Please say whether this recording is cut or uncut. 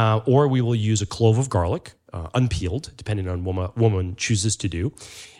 uncut